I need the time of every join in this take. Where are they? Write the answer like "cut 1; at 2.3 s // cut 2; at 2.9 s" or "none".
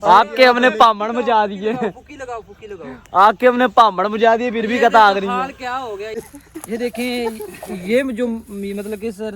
cut 1; at 6.1 s